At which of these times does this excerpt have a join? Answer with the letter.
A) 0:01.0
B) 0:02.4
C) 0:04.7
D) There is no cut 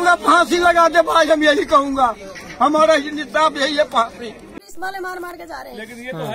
D